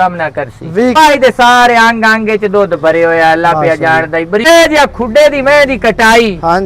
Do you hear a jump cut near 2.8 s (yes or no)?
no